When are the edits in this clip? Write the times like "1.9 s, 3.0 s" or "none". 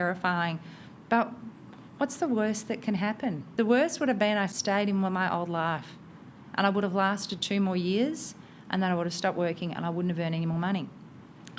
3.5 s, 4.6 s